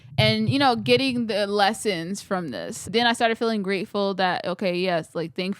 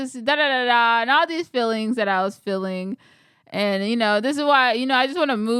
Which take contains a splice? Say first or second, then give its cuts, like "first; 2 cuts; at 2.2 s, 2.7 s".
first; 1 cut; at 2.9 s